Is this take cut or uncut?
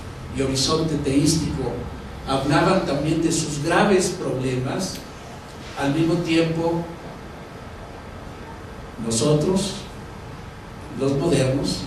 cut